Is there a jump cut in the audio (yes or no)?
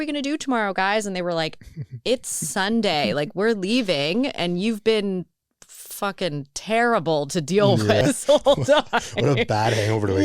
yes